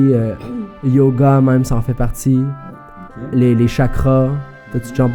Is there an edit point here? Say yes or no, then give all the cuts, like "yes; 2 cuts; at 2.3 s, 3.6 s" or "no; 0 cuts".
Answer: no; 0 cuts